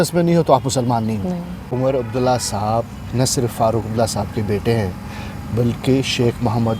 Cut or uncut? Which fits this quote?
cut